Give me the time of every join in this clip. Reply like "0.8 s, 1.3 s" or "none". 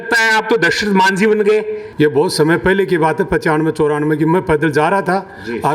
1.8 s